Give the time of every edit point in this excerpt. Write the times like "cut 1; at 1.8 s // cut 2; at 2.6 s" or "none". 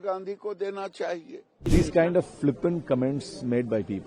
cut 1; at 1.6 s